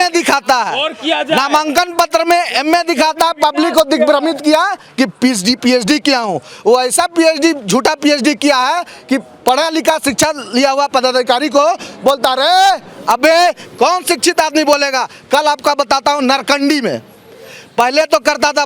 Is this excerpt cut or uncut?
uncut